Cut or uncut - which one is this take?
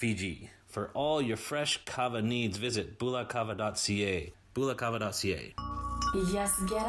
cut